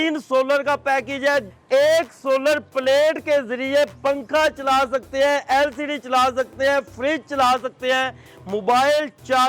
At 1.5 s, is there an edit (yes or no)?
yes